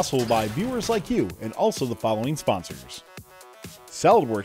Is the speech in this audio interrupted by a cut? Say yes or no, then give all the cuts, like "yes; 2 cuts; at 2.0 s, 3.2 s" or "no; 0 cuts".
yes; 1 cut; at 3.4 s